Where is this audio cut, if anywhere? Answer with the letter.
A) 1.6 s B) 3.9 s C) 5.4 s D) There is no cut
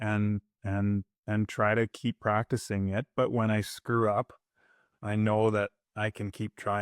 D